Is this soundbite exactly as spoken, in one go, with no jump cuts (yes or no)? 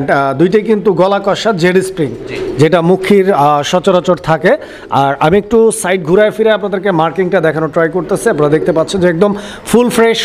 yes